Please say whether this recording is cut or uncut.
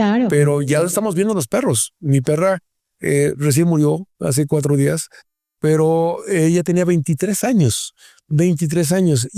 uncut